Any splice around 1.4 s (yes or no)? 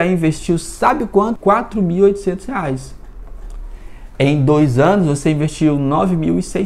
yes